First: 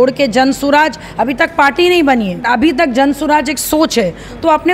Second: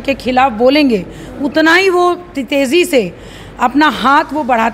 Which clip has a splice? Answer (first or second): first